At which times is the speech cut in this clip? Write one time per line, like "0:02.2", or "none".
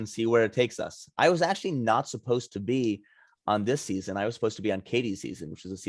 none